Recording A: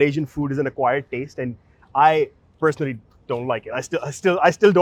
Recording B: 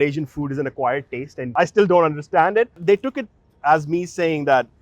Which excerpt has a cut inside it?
B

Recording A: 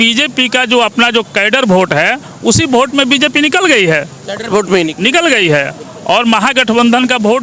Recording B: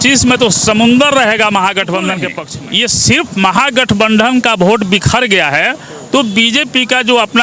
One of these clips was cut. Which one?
B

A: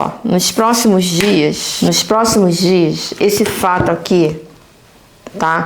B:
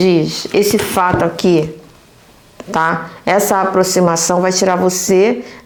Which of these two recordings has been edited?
A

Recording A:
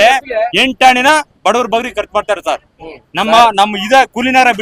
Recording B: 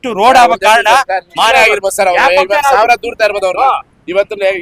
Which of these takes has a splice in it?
B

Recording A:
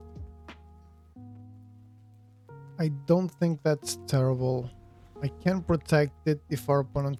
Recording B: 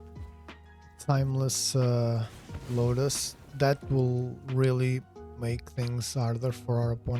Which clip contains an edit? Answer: B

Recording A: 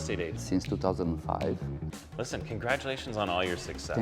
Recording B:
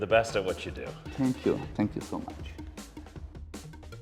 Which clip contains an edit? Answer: A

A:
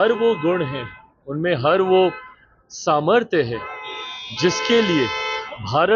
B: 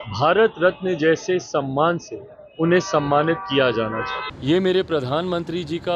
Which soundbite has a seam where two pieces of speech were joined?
B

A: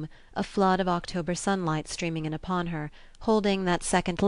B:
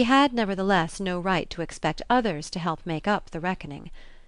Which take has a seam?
B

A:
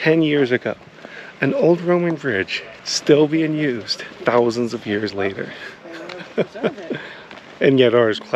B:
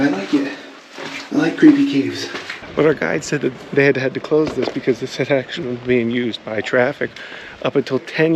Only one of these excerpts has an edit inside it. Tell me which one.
B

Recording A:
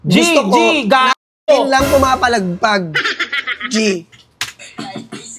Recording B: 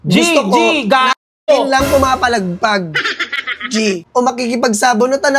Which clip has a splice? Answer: B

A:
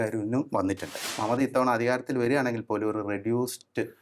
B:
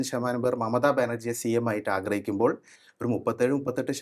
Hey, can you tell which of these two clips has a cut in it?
A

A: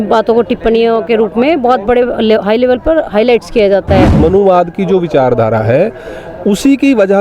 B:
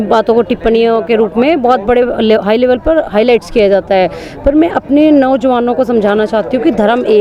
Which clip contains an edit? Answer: A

